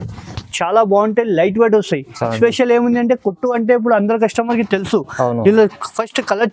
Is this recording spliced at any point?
no; 0 cuts

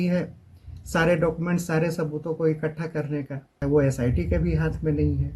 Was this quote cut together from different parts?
yes; 1 cut; at 3.5 s

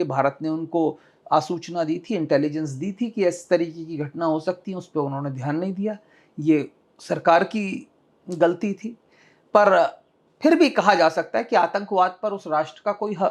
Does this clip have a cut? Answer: no; 0 cuts

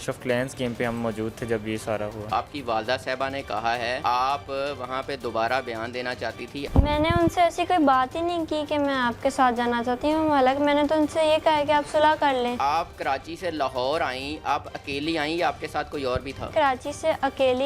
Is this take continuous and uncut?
no; 5 cuts; at 2.3 s, 4.0 s, 6.7 s, 12.6 s, 16.5 s

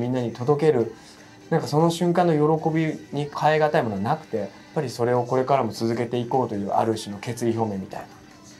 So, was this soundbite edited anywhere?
yes; 2 cuts; at 3.3 s, 4.6 s

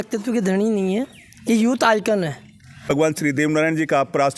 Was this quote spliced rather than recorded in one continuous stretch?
yes; 1 cut; at 2.9 s

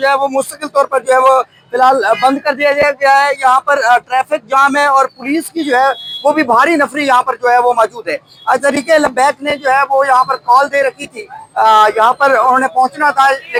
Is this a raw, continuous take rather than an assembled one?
yes; 0 cuts

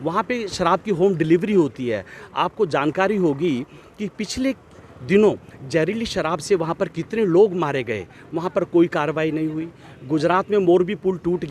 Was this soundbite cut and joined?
no; 0 cuts

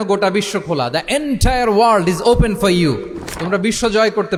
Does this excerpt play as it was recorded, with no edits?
yes; 0 cuts

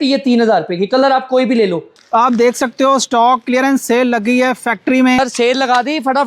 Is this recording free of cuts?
no; 2 cuts; at 2.0 s, 5.2 s

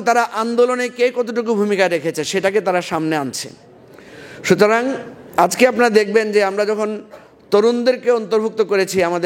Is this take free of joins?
yes; 0 cuts

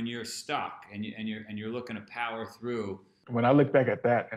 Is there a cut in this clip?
yes; 1 cut; at 3.2 s

